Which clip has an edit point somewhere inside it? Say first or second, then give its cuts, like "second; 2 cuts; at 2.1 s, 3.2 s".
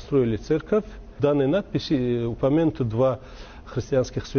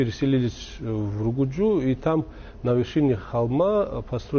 first; 1 cut; at 1.1 s